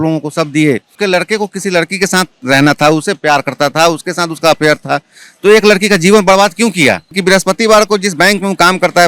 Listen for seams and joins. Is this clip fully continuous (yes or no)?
no